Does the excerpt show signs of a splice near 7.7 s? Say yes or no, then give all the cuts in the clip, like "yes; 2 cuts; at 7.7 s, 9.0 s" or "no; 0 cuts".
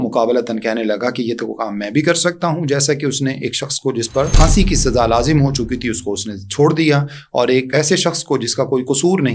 yes; 2 cuts; at 4.3 s, 7.7 s